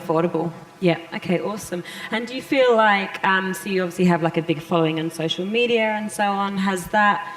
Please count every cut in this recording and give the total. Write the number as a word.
one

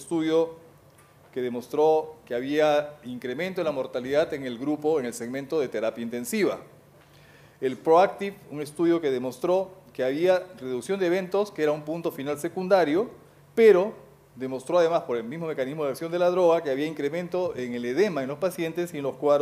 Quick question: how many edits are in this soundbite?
one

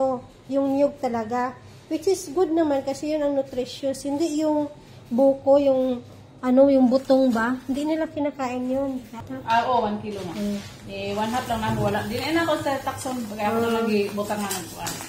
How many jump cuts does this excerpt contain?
one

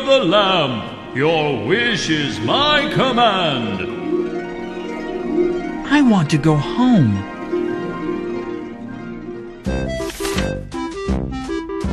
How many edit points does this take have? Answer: zero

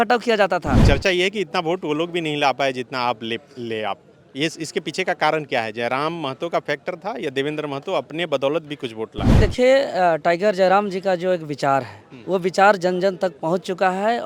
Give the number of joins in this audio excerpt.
two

